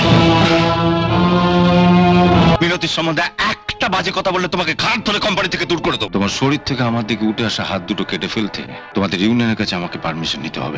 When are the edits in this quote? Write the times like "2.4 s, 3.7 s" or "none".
2.6 s, 6.0 s, 8.8 s